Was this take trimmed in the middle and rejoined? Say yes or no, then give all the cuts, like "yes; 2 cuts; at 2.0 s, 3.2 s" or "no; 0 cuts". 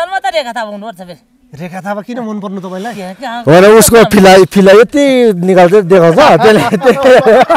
no; 0 cuts